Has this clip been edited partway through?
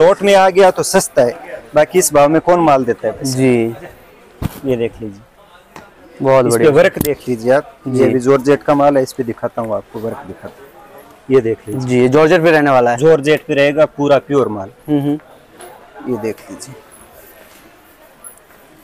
no; 0 cuts

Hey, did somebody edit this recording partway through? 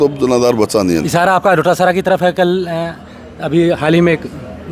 no; 0 cuts

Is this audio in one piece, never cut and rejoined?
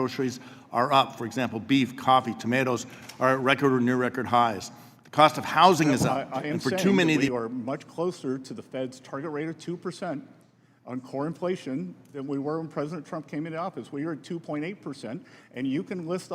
no; 1 cut; at 7.3 s

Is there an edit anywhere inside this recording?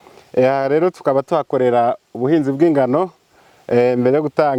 no; 0 cuts

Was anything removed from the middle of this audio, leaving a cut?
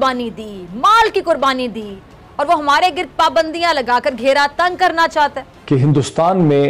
yes; 1 cut; at 5.5 s

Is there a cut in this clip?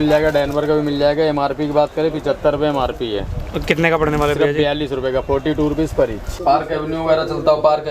yes; 1 cut; at 6.3 s

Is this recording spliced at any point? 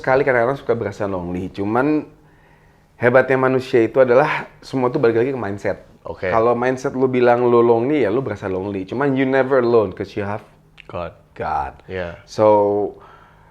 no; 0 cuts

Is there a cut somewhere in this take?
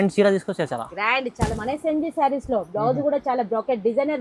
no; 0 cuts

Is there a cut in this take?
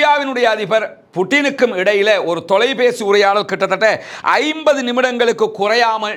no; 0 cuts

